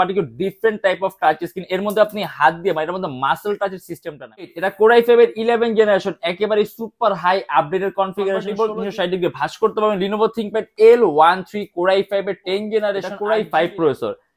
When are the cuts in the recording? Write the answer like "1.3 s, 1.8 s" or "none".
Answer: 4.6 s, 8.5 s, 13.1 s